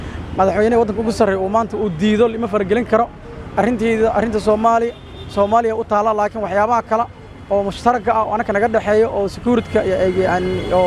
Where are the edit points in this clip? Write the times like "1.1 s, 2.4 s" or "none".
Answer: none